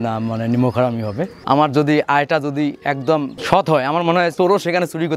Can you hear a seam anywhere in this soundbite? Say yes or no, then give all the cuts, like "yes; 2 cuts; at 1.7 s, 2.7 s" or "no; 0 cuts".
yes; 3 cuts; at 1.4 s, 3.3 s, 4.3 s